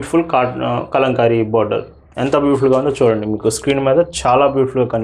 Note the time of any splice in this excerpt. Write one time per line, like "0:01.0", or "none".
none